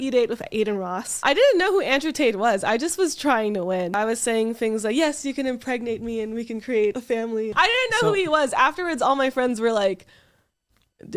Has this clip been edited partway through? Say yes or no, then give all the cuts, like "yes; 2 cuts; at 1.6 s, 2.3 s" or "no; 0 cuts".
yes; 3 cuts; at 1.2 s, 4.0 s, 7.4 s